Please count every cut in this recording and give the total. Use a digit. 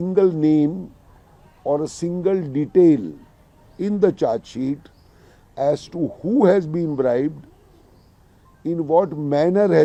0